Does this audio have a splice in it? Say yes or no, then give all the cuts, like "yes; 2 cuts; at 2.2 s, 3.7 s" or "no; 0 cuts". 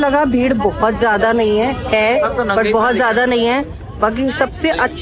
no; 0 cuts